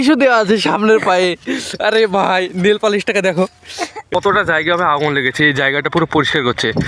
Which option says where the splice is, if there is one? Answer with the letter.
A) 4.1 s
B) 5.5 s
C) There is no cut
A